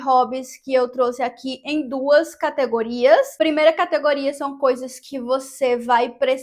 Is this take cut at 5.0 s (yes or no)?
no